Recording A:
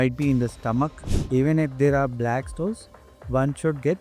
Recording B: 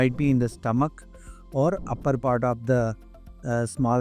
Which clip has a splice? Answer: A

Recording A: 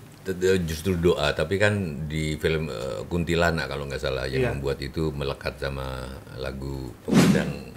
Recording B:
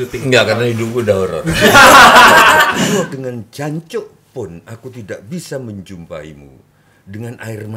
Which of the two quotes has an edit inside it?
B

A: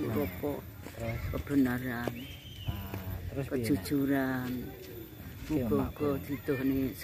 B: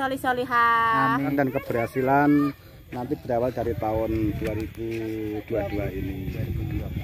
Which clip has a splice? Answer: B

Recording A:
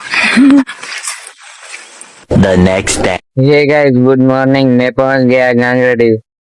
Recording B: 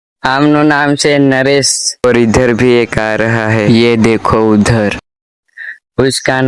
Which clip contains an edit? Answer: A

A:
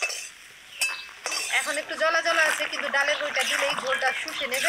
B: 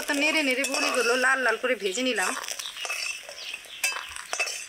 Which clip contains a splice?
A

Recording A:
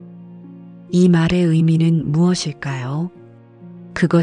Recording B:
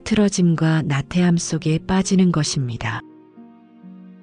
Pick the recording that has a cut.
A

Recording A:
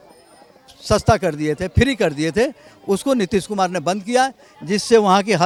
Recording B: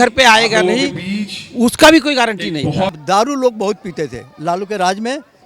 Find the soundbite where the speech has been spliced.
B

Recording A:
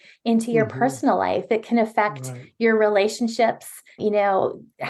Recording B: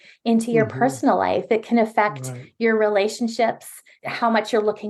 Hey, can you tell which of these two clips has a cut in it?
B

